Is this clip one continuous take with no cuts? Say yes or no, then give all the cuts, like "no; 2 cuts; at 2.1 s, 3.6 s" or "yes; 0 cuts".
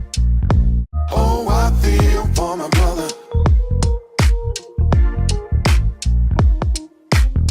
no; 1 cut; at 1.0 s